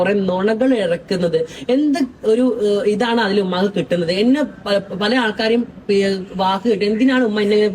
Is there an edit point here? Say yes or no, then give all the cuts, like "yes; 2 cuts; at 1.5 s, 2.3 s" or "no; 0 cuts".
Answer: no; 0 cuts